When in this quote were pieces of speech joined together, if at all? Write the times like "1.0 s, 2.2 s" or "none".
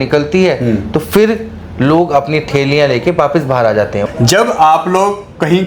4.0 s